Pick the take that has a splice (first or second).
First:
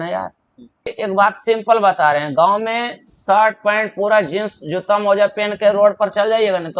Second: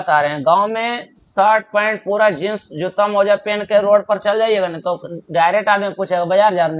first